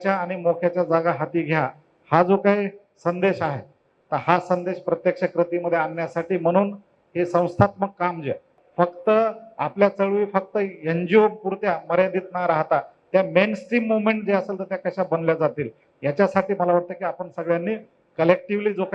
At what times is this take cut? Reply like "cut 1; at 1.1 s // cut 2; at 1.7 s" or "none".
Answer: cut 1; at 8.6 s